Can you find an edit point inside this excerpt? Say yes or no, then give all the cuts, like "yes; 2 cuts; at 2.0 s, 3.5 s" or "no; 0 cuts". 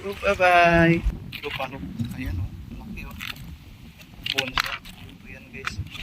yes; 1 cut; at 1.1 s